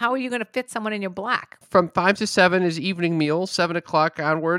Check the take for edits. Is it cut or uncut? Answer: cut